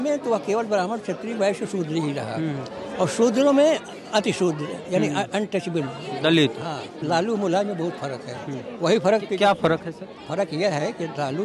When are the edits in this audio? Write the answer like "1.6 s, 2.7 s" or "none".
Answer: 6.9 s